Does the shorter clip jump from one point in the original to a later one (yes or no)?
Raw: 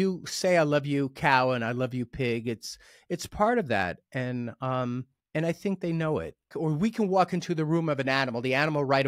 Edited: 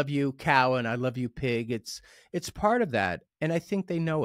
yes